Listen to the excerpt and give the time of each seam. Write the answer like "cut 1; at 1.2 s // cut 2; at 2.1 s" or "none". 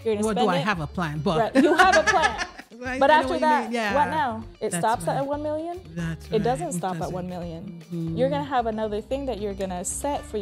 none